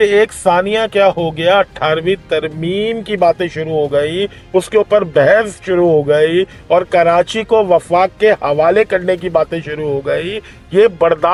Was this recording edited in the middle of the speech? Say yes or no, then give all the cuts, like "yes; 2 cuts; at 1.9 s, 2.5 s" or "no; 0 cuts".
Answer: no; 0 cuts